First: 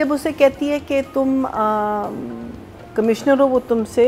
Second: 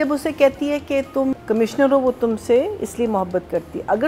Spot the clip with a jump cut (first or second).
second